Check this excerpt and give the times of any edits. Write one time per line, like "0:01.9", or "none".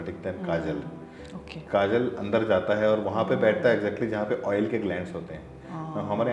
none